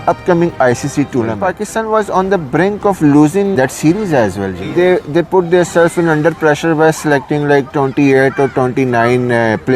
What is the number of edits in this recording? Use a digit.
3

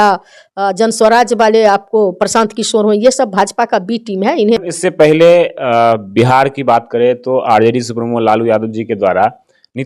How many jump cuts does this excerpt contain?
1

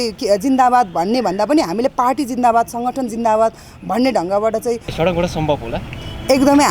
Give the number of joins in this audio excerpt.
1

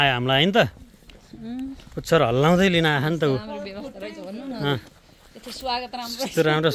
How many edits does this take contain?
0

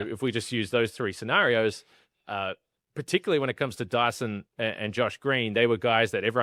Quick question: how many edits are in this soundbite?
0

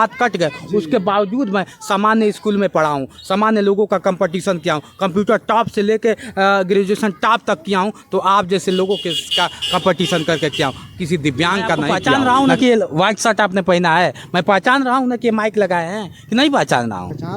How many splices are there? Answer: 1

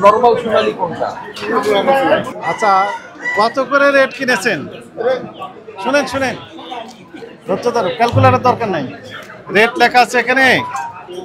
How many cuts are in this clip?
1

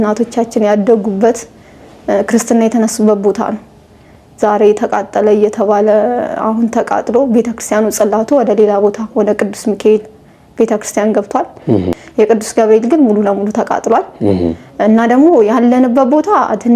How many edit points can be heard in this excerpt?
1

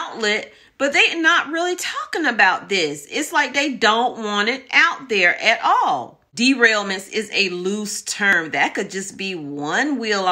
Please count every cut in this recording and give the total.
1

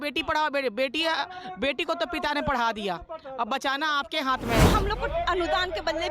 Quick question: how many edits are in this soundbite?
1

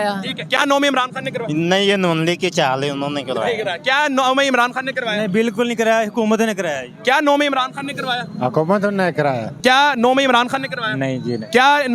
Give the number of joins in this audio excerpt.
1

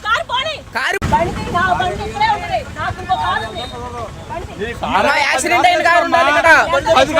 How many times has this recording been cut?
1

